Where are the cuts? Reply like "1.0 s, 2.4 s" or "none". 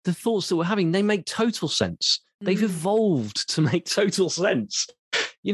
none